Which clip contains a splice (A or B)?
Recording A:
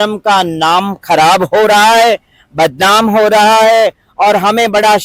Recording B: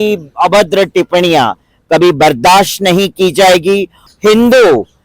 B